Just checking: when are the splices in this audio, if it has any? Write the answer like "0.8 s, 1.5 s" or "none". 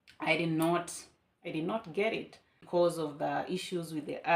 2.6 s